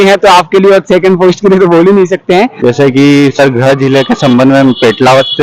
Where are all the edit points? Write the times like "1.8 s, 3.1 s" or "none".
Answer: 2.5 s